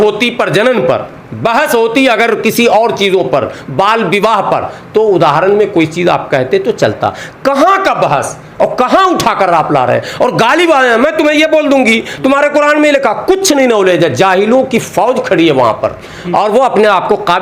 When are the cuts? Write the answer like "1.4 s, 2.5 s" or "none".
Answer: none

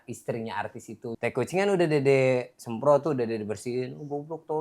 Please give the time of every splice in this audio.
1.2 s

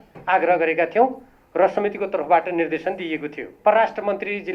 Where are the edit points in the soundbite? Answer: 3.5 s

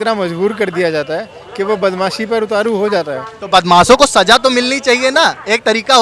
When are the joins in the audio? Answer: none

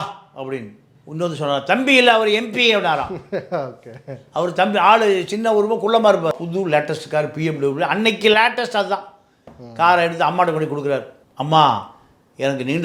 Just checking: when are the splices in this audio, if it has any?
6.3 s

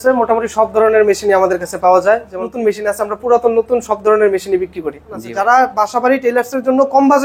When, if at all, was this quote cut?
2.4 s, 5.3 s

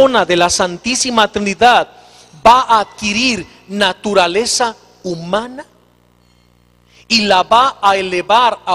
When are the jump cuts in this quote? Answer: 1.9 s

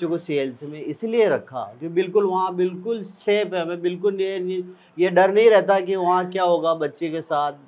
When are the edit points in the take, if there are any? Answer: none

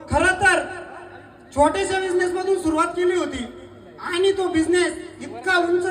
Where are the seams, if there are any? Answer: none

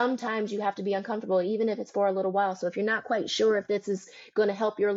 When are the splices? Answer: none

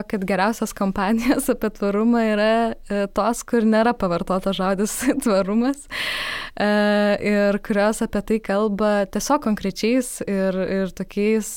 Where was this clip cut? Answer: none

